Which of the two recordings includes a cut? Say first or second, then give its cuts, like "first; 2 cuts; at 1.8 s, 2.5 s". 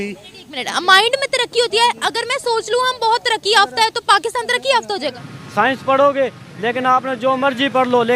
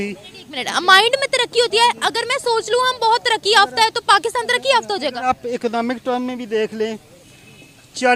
first; 1 cut; at 5.2 s